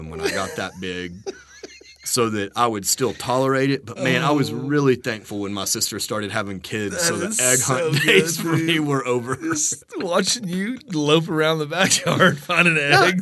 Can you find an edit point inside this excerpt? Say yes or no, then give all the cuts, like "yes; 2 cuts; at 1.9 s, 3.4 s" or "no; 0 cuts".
no; 0 cuts